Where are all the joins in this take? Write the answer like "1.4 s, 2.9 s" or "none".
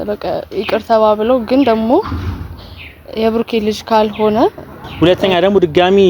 4.8 s